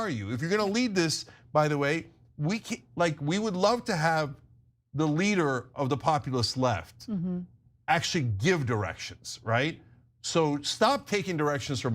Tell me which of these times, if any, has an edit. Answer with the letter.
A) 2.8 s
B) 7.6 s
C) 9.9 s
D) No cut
C